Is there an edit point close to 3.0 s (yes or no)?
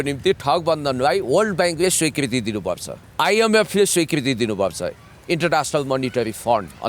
yes